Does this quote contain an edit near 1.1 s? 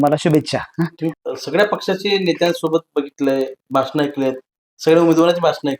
yes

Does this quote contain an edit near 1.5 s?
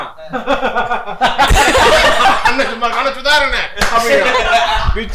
no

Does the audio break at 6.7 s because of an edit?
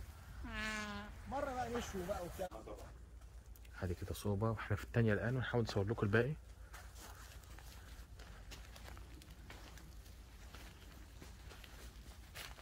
no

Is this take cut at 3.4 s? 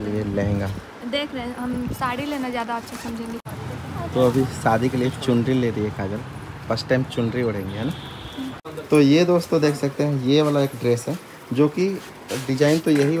yes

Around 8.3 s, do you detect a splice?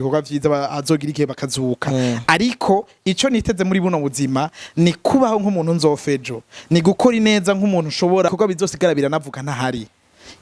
yes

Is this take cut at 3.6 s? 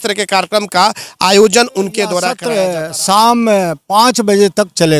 no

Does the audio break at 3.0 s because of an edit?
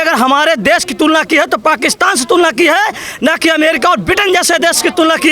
no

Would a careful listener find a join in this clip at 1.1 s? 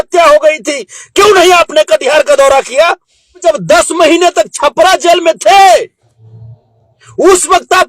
no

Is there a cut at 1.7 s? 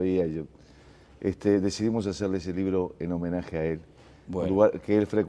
no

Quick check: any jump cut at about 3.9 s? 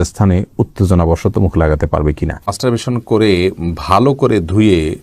no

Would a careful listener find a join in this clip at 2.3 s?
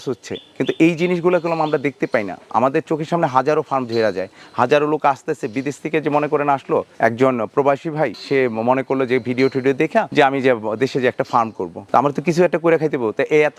no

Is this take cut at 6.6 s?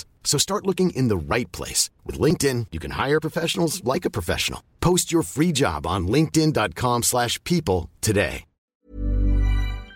no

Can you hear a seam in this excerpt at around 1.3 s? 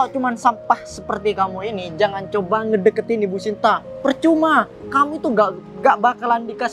no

